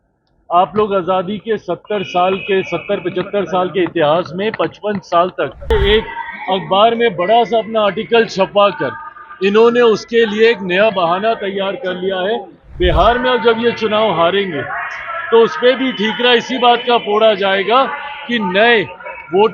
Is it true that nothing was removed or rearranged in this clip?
no; 1 cut; at 5.7 s

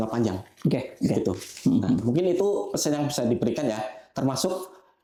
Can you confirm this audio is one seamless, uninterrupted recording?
yes; 0 cuts

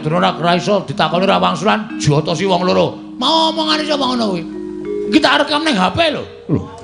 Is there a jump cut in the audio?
no; 0 cuts

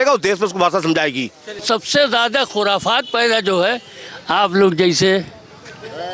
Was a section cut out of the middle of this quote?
yes; 1 cut; at 1.6 s

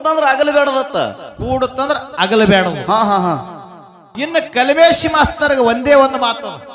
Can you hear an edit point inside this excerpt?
yes; 1 cut; at 4.0 s

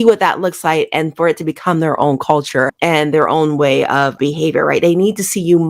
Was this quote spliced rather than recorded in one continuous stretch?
yes; 1 cut; at 4.2 s

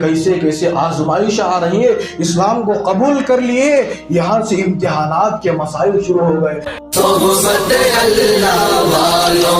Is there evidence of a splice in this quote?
yes; 1 cut; at 6.7 s

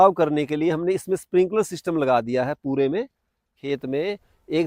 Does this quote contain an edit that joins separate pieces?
yes; 1 cut; at 3.6 s

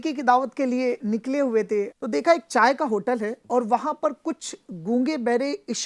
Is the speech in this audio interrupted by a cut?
yes; 3 cuts; at 1.0 s, 2.0 s, 3.4 s

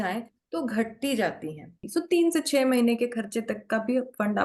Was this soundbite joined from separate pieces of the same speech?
yes; 1 cut; at 1.8 s

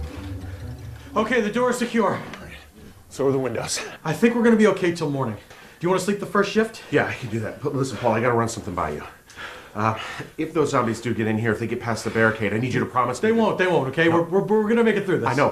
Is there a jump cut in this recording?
yes; 1 cut; at 10.7 s

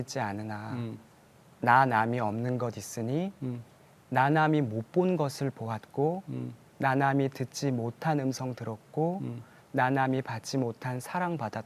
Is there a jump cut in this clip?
no; 0 cuts

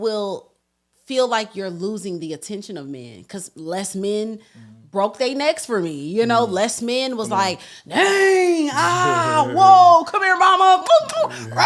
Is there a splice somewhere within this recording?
no; 0 cuts

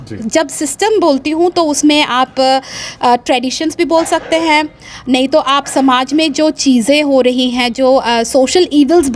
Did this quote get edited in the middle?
no; 0 cuts

